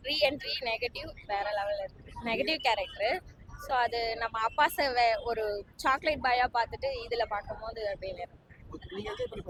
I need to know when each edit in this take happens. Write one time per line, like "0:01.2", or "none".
none